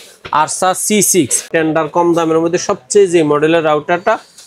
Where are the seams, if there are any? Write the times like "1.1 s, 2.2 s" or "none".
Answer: 1.5 s